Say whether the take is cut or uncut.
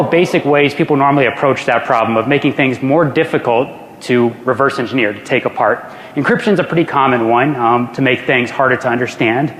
uncut